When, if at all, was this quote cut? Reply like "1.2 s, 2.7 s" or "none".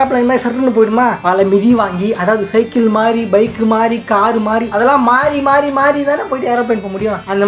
none